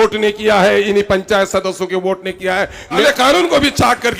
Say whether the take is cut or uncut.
cut